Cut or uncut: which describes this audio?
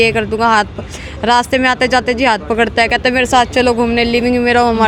uncut